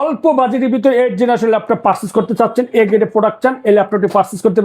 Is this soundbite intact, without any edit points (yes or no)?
yes